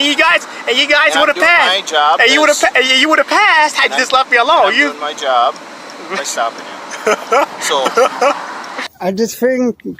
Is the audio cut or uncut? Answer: cut